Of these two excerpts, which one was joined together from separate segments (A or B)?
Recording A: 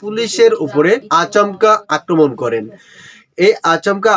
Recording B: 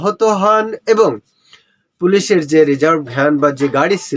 A